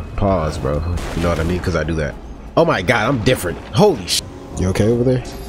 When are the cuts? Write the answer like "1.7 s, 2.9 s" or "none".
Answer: 0.9 s, 4.1 s